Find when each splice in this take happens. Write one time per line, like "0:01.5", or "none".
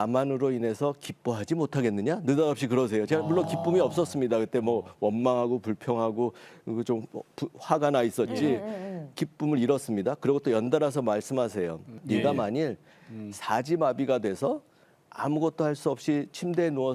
0:12.0

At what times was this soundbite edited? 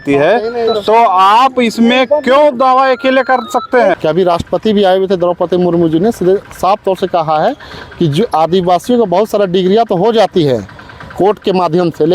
0:04.0

